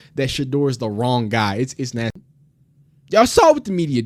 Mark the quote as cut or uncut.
uncut